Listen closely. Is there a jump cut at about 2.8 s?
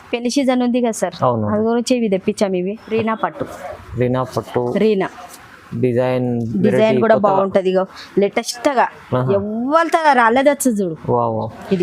yes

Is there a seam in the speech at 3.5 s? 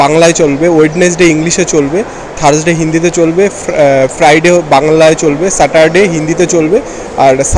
no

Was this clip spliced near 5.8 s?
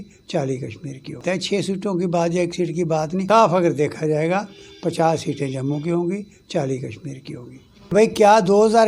no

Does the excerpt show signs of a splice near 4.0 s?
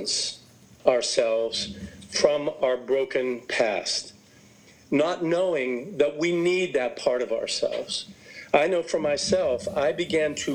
no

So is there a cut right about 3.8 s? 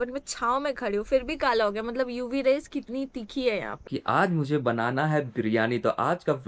yes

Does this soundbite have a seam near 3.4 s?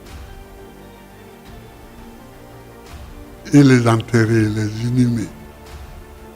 yes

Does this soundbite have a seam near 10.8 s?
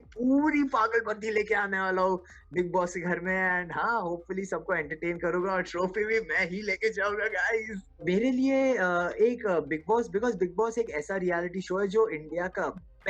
no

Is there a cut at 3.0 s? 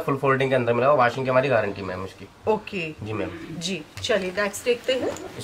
no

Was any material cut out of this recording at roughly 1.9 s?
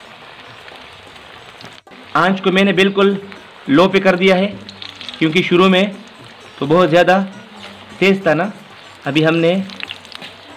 yes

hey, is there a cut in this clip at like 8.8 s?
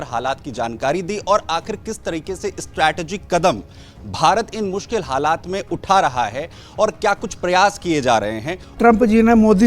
yes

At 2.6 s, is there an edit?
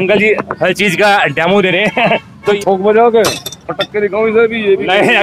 yes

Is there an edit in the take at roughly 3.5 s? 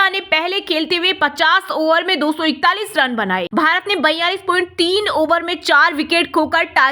yes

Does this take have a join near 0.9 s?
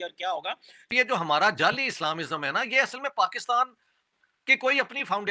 yes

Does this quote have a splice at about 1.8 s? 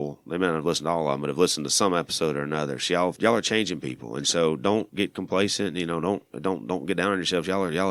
no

